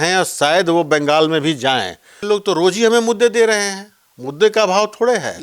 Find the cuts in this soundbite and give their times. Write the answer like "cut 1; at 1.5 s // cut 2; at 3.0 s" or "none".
cut 1; at 2.3 s